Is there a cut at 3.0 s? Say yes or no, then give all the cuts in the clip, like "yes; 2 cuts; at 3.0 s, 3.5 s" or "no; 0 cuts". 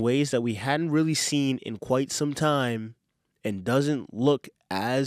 no; 0 cuts